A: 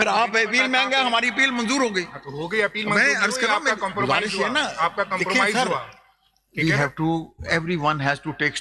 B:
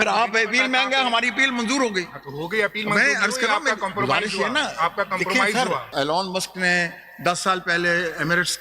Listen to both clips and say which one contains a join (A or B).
B